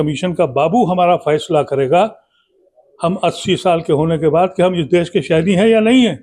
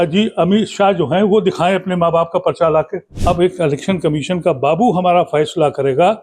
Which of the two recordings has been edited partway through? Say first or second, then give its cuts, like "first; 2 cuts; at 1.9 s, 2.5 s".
second; 1 cut; at 3.0 s